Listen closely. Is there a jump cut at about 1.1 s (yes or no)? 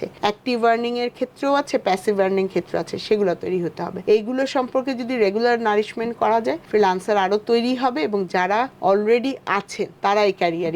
no